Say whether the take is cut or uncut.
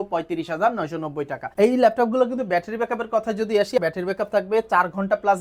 cut